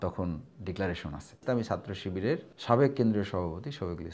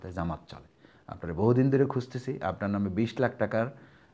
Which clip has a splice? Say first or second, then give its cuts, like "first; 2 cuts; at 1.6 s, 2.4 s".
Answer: first; 2 cuts; at 1.4 s, 2.5 s